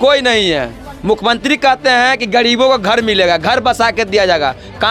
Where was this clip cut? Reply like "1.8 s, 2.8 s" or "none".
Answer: none